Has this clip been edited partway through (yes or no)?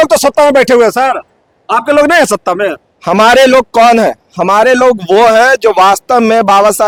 no